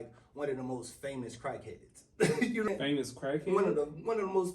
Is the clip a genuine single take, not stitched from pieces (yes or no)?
no